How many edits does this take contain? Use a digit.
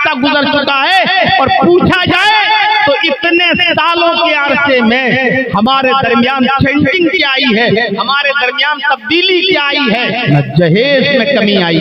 1